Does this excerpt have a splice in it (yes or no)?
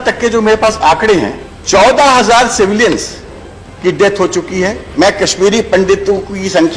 yes